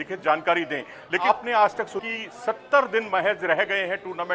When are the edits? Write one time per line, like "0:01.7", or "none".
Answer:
0:01.2